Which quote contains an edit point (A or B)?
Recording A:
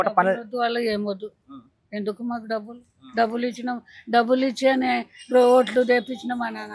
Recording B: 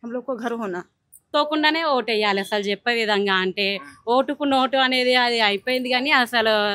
B